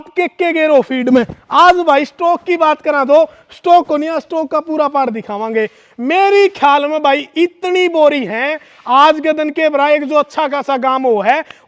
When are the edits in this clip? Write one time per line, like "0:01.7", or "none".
none